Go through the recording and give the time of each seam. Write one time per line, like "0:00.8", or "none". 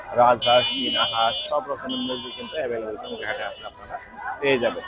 none